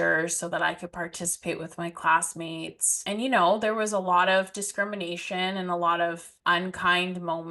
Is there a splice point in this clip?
yes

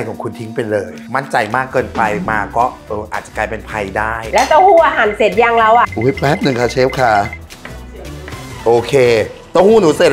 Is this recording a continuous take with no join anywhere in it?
yes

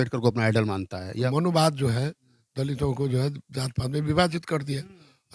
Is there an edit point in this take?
yes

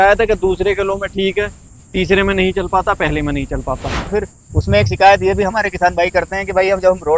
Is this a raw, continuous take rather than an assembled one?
no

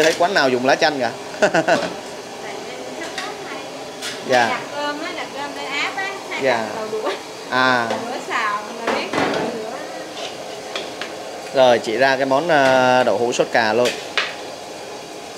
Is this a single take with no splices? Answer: yes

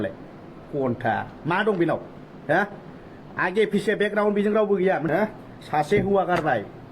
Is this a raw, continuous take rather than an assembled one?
no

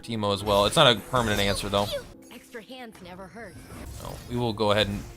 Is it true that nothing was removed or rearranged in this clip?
no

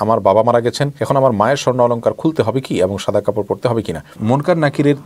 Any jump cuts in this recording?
yes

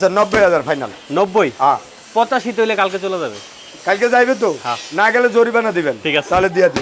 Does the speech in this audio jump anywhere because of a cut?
no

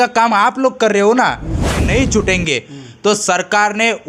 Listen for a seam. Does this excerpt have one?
yes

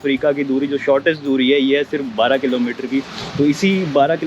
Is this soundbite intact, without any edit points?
yes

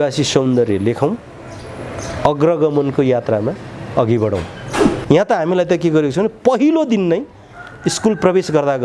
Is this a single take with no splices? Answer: no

